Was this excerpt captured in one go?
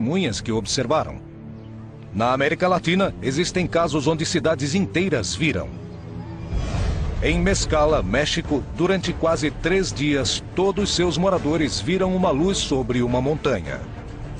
yes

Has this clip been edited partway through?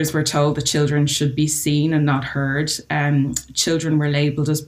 no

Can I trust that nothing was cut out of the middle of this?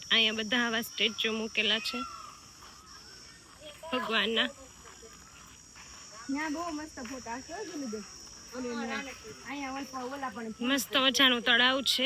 yes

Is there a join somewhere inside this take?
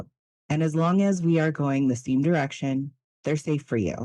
no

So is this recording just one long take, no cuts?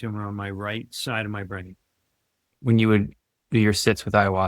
no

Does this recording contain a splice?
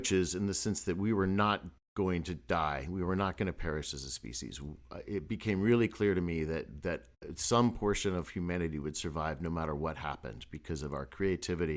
no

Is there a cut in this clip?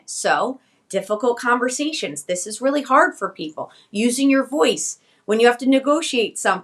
no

